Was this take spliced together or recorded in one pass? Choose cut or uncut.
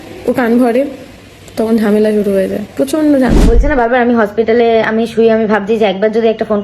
cut